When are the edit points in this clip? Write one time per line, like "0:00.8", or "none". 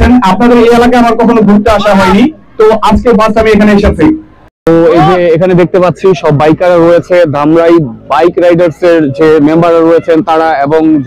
0:04.7